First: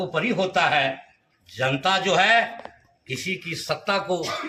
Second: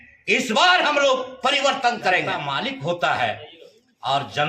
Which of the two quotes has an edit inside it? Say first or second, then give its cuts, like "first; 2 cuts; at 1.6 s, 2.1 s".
second; 1 cut; at 2.4 s